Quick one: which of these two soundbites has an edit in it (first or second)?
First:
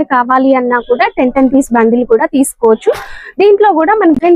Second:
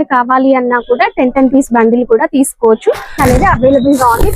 second